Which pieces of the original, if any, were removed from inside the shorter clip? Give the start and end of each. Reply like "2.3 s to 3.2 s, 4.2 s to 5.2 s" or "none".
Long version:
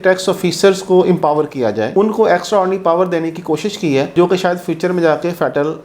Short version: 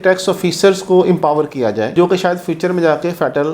1.9 s to 4.1 s